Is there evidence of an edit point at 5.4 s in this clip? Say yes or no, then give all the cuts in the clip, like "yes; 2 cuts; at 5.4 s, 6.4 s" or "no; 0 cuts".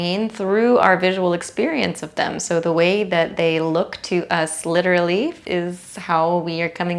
yes; 1 cut; at 5.4 s